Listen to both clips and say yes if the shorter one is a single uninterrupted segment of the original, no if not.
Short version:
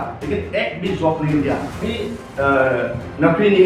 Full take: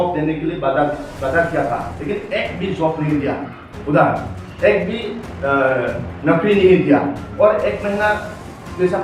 no